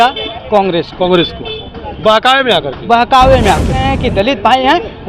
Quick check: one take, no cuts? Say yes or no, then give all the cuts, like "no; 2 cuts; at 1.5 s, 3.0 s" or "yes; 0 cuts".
no; 1 cut; at 3.8 s